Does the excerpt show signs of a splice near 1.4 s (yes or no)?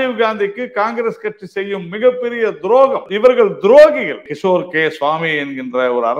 no